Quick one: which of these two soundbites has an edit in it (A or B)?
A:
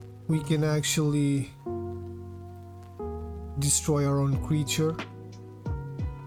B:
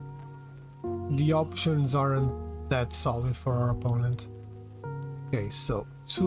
B